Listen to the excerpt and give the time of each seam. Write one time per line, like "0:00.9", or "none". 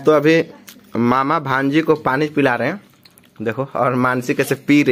none

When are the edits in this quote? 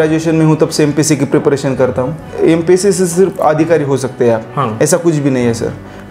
0:02.3

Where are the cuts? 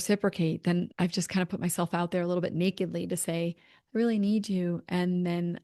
0:00.9

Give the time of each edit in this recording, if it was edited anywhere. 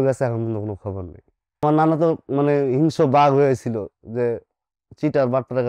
0:01.6

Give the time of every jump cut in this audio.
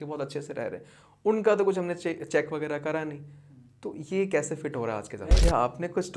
0:05.2

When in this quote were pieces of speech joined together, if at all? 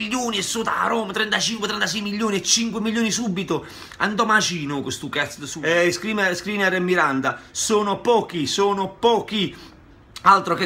0:05.5

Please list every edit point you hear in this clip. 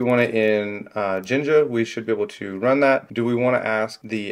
0:03.1

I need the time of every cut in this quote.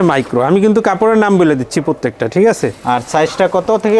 none

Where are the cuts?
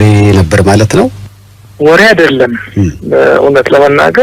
none

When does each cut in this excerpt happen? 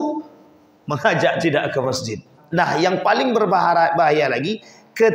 0:02.3

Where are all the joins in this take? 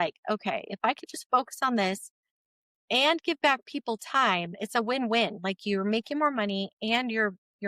none

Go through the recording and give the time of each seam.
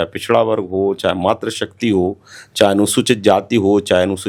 none

